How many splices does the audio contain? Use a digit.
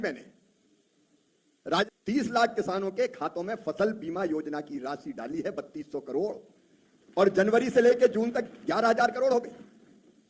1